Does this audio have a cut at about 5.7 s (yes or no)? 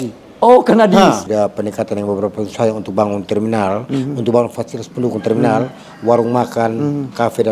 no